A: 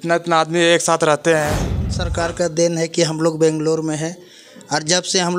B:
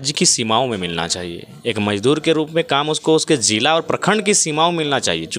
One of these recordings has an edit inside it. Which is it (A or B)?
A